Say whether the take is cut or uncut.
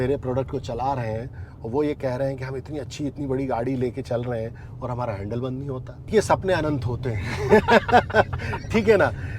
cut